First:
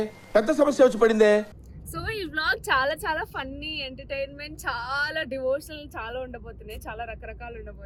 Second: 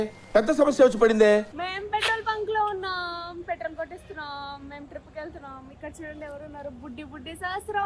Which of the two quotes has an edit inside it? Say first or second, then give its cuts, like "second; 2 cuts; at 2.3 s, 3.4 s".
second; 1 cut; at 1.6 s